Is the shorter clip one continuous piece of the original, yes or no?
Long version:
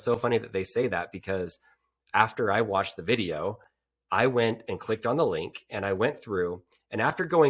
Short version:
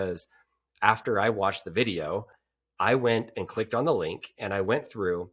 yes